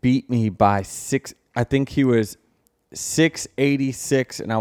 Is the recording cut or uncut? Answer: uncut